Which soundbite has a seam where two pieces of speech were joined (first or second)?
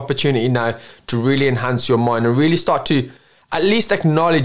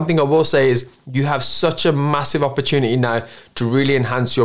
second